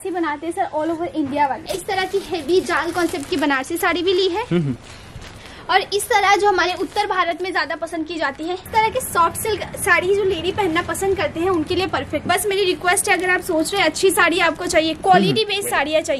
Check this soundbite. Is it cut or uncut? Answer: cut